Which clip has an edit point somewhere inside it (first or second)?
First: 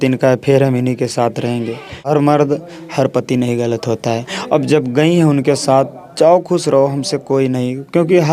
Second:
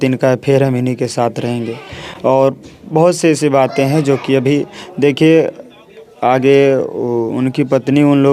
first